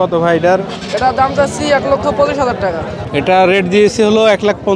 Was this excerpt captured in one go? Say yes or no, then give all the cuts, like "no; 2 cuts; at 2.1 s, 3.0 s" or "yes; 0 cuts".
no; 1 cut; at 2.9 s